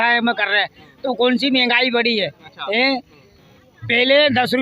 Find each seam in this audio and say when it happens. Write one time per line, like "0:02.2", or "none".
none